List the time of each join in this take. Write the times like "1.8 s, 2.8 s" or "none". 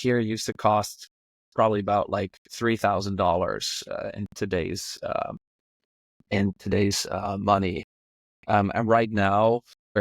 none